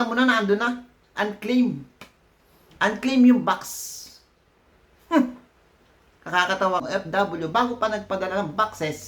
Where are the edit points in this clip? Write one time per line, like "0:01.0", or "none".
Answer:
0:06.8